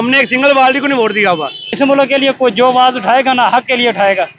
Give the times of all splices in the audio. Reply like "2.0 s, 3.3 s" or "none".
1.7 s